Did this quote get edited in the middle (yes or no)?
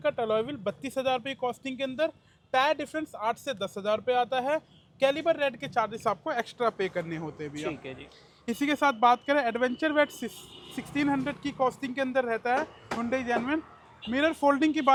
no